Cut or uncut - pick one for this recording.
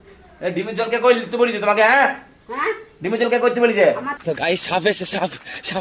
cut